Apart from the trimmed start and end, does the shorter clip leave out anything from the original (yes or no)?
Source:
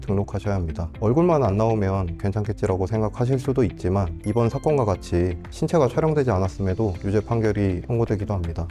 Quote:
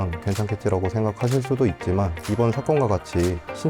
no